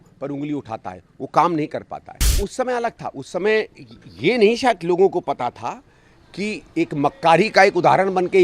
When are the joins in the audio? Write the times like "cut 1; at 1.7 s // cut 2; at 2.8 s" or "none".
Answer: cut 1; at 2.4 s